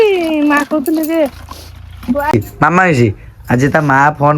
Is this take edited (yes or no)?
yes